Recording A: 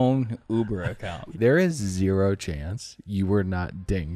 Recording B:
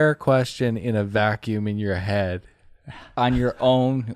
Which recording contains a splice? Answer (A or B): A